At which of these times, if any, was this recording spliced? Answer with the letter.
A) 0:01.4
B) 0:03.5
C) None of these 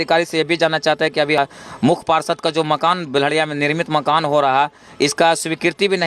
A